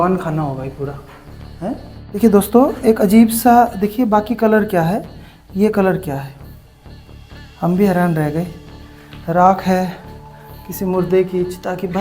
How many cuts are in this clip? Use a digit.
1